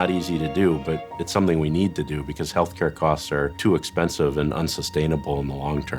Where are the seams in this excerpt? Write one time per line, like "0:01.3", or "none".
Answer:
0:03.5